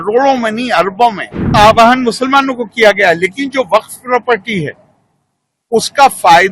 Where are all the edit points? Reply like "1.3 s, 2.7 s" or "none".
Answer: 1.5 s